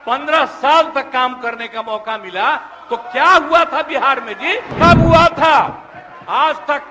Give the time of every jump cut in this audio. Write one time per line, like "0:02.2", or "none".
0:04.7